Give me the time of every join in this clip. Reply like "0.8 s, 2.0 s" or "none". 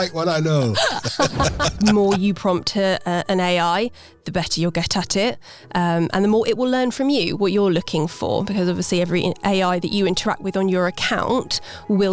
1.8 s